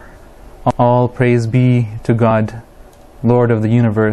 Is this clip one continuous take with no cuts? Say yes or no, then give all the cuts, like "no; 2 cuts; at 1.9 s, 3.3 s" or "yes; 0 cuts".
yes; 0 cuts